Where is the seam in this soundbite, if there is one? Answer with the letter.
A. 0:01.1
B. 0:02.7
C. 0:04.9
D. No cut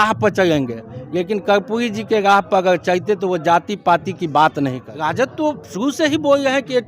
C